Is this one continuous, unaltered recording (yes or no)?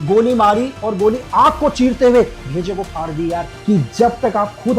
no